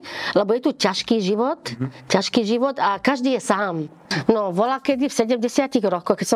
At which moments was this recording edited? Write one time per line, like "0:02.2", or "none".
0:04.1